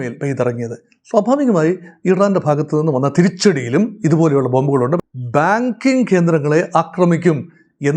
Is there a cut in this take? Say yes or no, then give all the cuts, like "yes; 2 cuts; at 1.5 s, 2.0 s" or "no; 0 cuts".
yes; 1 cut; at 5.0 s